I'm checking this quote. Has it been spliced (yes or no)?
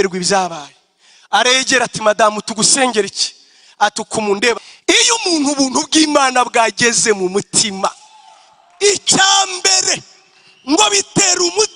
yes